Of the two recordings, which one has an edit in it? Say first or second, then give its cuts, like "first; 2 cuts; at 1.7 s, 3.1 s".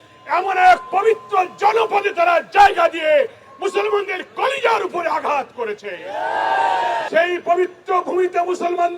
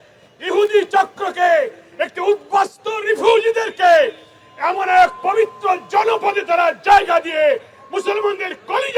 first; 1 cut; at 7.1 s